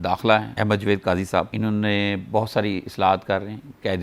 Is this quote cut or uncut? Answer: uncut